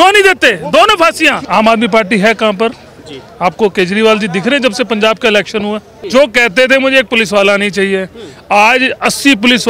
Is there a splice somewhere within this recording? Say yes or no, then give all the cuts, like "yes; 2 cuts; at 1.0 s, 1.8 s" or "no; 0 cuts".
yes; 2 cuts; at 1.4 s, 5.9 s